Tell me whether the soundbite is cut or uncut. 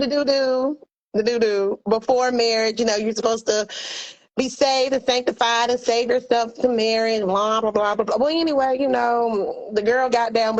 uncut